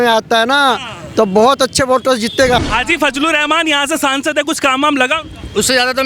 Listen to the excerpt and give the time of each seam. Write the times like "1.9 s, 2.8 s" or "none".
2.7 s